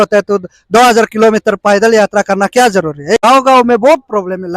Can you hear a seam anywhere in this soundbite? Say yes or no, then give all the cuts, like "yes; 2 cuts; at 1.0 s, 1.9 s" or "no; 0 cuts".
yes; 1 cut; at 3.2 s